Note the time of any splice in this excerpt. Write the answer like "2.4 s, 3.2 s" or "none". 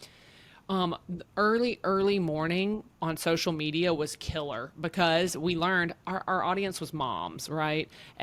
none